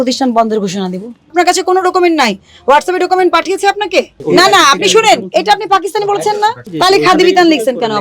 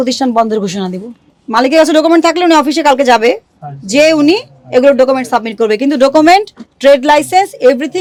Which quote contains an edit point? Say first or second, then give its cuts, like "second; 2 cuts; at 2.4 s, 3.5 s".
first; 2 cuts; at 1.3 s, 4.2 s